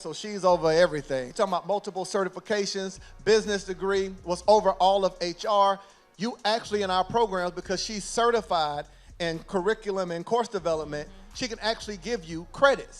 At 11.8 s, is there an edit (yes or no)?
no